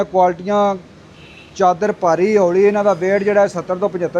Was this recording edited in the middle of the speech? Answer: no; 0 cuts

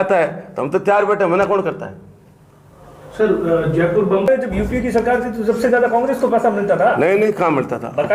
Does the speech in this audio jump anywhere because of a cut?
yes; 1 cut; at 4.3 s

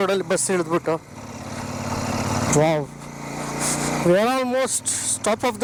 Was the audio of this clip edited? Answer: no; 0 cuts

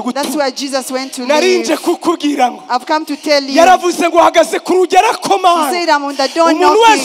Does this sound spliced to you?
no; 0 cuts

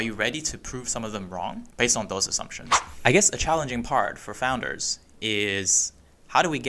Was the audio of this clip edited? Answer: yes; 2 cuts; at 1.6 s, 2.9 s

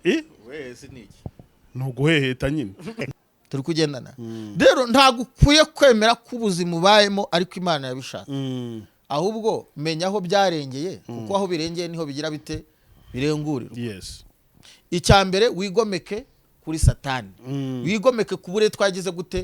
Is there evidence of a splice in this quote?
yes; 1 cut; at 2.9 s

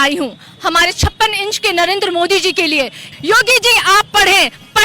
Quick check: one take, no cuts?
no; 1 cut; at 3.1 s

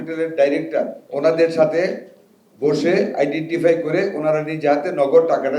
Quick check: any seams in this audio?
yes; 1 cut; at 1.0 s

